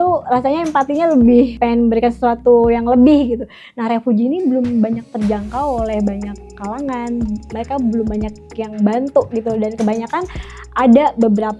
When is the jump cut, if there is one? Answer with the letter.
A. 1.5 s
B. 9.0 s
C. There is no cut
A